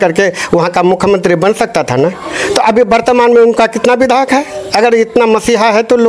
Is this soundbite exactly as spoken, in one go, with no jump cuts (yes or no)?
yes